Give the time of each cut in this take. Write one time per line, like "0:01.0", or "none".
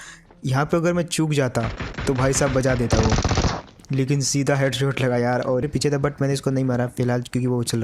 0:05.6